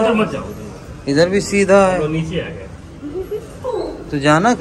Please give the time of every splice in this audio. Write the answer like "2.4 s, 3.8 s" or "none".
none